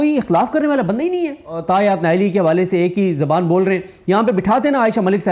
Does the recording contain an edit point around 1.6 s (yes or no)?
yes